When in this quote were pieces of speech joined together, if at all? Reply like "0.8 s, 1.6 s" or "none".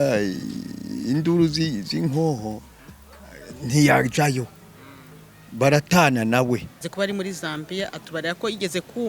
6.8 s